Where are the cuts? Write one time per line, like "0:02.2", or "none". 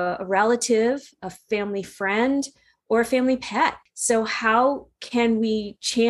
0:03.9